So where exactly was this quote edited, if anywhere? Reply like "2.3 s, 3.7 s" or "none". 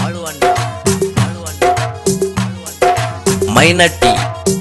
none